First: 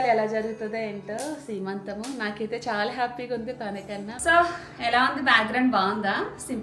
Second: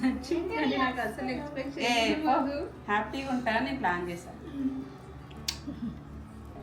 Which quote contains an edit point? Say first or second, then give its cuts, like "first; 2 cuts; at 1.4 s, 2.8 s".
first; 1 cut; at 4.2 s